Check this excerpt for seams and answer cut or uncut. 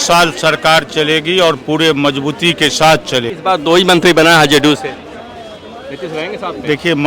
cut